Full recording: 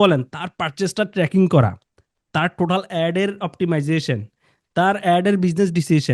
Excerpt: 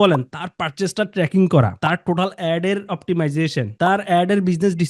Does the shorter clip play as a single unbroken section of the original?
no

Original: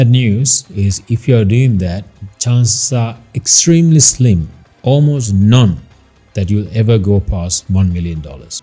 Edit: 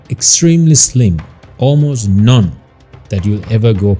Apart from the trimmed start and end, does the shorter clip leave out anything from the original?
no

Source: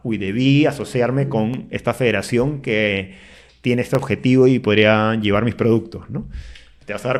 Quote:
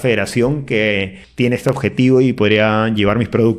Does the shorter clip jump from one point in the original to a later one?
yes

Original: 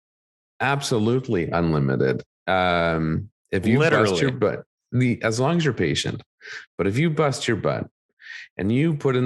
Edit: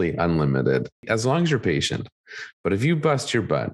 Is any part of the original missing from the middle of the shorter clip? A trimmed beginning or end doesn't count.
yes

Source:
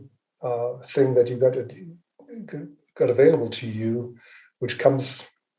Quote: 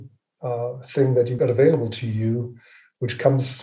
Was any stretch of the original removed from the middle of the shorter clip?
yes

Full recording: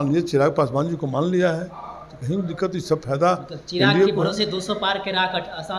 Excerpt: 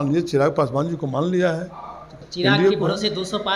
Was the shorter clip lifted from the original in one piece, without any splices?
no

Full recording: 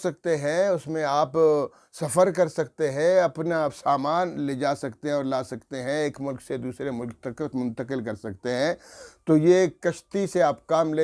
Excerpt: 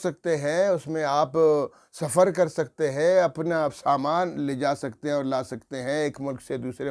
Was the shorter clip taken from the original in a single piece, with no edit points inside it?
yes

